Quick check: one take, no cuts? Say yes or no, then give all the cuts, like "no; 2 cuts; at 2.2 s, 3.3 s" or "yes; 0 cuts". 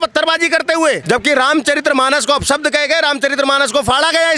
no; 1 cut; at 1.0 s